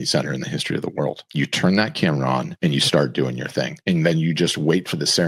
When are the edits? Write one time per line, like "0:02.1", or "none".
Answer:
0:01.2
0:02.5
0:03.7